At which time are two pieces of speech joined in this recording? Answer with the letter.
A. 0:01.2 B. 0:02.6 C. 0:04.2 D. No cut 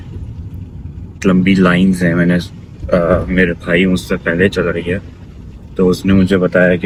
D